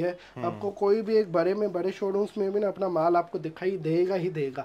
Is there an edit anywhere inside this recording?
no; 0 cuts

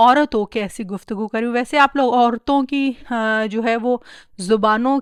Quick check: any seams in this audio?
no; 0 cuts

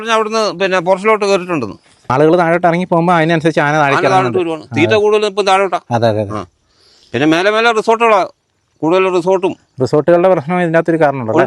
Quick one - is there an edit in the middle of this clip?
yes; 1 cut; at 2.1 s

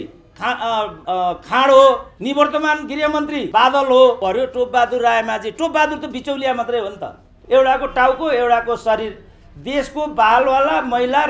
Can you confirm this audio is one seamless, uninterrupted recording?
no; 5 cuts; at 1.0 s, 2.1 s, 3.5 s, 4.2 s, 7.3 s

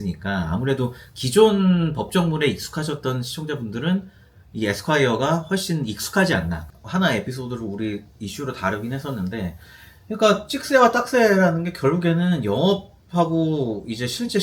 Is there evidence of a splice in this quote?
yes; 1 cut; at 6.6 s

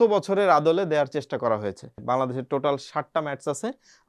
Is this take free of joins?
no; 1 cut; at 2.0 s

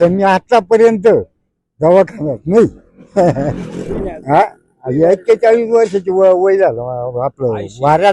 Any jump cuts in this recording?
yes; 1 cut; at 4.0 s

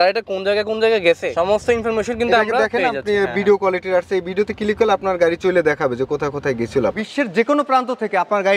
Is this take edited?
yes; 2 cuts; at 1.3 s, 7.0 s

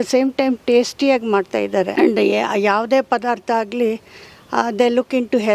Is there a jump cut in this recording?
no; 0 cuts

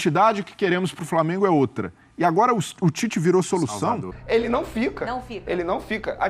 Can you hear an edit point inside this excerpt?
yes; 1 cut; at 4.1 s

